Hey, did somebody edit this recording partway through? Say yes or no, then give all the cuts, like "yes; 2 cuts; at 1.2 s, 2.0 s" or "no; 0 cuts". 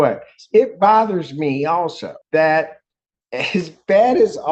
no; 0 cuts